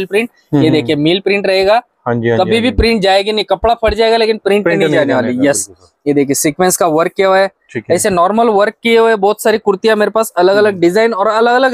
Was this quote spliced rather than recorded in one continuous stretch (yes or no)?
no